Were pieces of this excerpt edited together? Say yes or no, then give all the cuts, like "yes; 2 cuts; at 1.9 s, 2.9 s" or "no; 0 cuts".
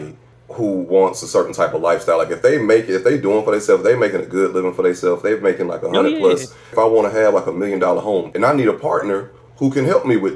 yes; 3 cuts; at 6.7 s, 8.3 s, 9.4 s